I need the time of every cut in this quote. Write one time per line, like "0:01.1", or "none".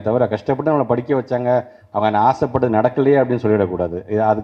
none